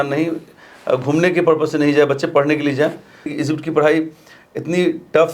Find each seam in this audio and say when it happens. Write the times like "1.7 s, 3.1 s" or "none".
3.3 s